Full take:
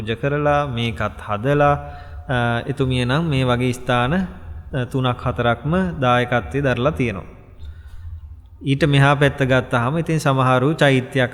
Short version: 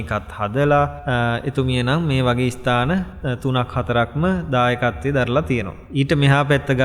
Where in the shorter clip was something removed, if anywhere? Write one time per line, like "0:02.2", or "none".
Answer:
0:01.0
0:03.2
0:05.8